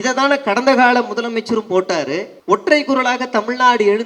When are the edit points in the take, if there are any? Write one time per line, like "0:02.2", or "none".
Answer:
0:02.3

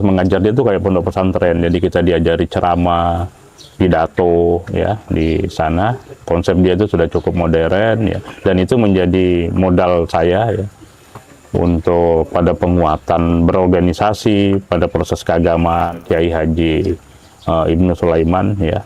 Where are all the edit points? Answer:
0:16.0

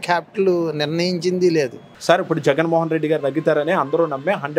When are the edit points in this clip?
0:01.9

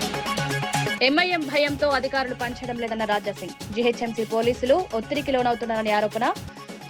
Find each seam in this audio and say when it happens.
0:00.9

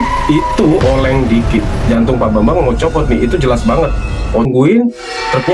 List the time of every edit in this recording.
0:04.5

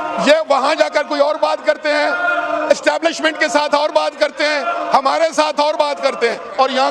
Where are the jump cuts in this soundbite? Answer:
none

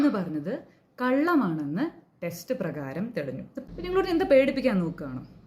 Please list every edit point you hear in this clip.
0:03.6

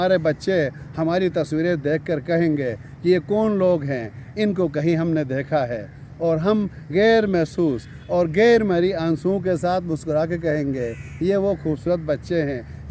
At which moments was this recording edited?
none

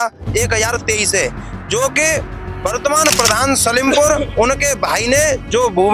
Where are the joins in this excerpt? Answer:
none

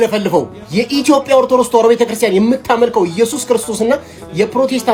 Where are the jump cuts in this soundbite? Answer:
none

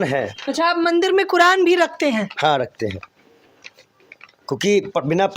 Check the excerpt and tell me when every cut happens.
none

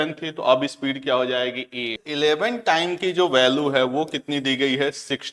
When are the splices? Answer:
0:02.0

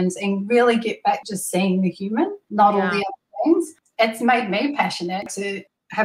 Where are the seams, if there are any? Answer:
0:01.2
0:02.4
0:03.8
0:05.3

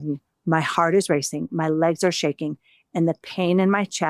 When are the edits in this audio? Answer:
none

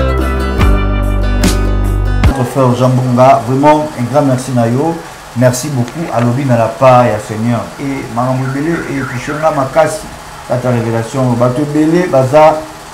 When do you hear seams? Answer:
0:02.4

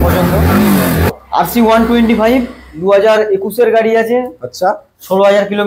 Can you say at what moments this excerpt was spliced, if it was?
0:01.1

